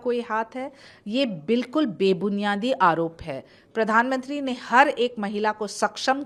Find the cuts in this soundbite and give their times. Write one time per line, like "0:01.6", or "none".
none